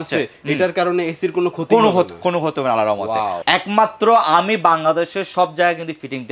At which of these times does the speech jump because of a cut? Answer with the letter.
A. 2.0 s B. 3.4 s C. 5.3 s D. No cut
B